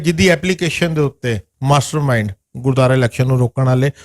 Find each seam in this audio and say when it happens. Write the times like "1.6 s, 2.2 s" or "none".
1.5 s